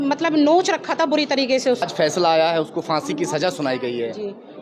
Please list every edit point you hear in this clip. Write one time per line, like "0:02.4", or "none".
0:01.8